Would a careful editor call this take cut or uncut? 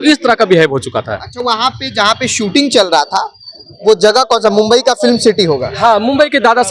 uncut